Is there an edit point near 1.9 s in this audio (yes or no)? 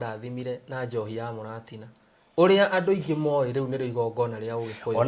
no